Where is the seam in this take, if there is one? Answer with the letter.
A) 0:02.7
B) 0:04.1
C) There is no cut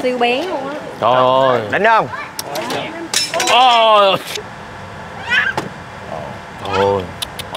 B